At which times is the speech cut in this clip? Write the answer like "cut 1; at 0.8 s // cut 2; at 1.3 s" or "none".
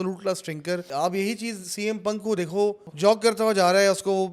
cut 1; at 0.9 s // cut 2; at 2.9 s